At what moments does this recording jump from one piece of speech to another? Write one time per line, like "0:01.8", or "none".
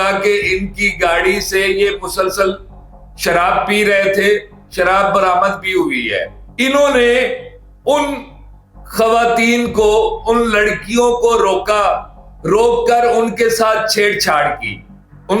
none